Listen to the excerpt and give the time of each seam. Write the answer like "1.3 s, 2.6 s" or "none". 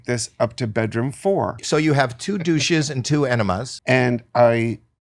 1.6 s, 3.7 s